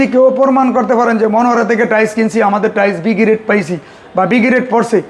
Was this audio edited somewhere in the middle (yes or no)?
no